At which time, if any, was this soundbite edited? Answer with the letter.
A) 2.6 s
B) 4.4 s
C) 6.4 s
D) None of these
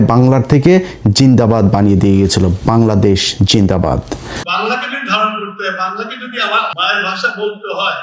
B